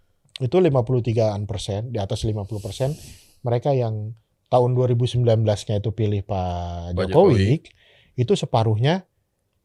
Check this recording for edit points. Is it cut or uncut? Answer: uncut